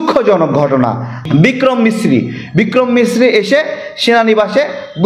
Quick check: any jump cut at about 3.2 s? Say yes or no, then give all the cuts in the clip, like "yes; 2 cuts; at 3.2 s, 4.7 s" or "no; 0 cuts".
no; 1 cut; at 1.2 s